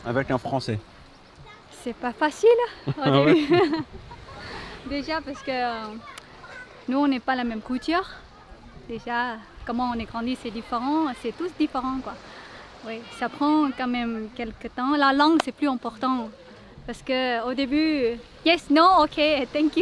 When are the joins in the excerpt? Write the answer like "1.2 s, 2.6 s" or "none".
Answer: none